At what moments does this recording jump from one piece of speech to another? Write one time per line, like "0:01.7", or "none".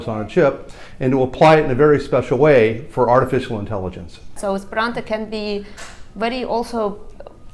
0:04.4

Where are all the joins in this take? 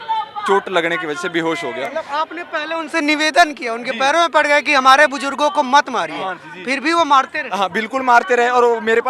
none

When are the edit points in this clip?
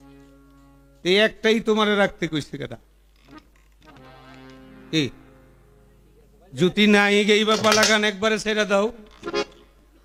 none

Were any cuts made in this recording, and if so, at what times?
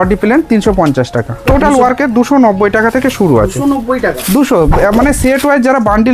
0:01.5

